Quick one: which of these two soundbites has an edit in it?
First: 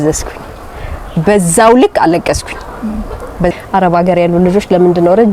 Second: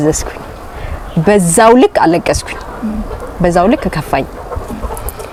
first; 1 cut; at 3.5 s

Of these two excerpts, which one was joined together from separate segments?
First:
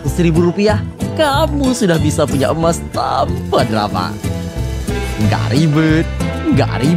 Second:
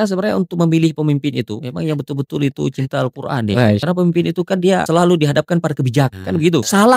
second; 4 cuts; at 1.5 s, 3.8 s, 4.9 s, 6.2 s

